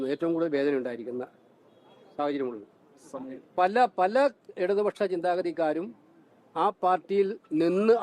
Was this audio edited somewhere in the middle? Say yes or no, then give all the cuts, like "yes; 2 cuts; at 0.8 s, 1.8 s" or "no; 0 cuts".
no; 0 cuts